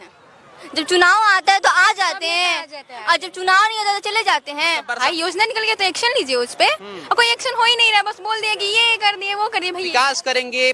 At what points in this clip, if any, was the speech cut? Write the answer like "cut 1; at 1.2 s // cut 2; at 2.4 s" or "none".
cut 1; at 5.0 s // cut 2; at 9.8 s